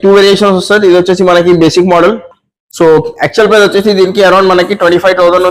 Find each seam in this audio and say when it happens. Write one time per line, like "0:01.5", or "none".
none